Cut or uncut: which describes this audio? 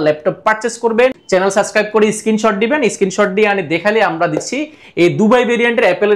cut